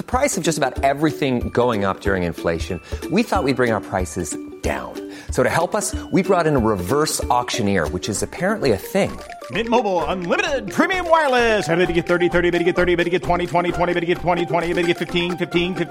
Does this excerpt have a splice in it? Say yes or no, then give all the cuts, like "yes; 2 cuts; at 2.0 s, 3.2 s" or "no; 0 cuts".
no; 0 cuts